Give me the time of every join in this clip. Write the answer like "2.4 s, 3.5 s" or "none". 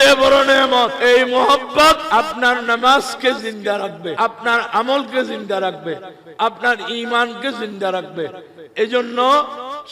1.0 s, 2.0 s, 4.1 s